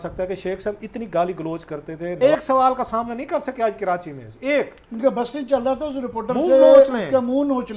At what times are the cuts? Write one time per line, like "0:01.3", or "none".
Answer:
0:02.1